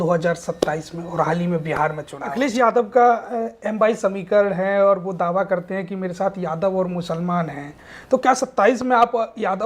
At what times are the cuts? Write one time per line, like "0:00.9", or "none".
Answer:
0:02.3